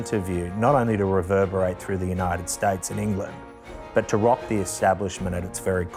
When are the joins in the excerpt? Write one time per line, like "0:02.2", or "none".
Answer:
none